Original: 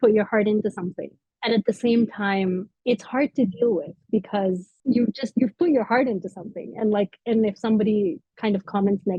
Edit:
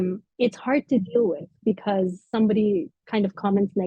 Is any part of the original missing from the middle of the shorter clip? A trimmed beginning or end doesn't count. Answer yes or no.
yes